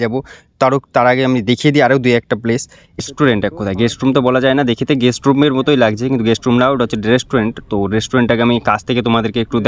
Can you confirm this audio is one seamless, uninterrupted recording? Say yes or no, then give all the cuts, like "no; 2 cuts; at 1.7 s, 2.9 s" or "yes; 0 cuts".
no; 1 cut; at 3.0 s